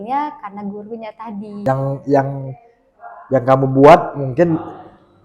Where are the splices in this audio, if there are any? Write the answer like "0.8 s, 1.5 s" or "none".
1.5 s